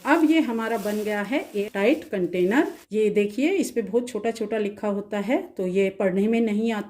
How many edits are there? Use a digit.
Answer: 2